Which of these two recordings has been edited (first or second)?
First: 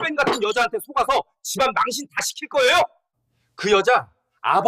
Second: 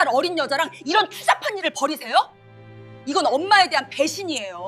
first